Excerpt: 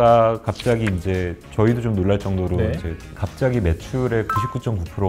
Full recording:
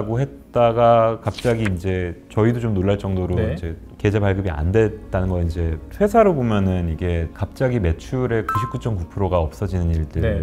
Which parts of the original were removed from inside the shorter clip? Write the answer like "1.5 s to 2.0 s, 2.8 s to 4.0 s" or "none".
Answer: 3.9 s to 7.3 s